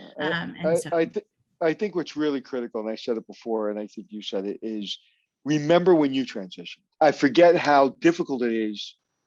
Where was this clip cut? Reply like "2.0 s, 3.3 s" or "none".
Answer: none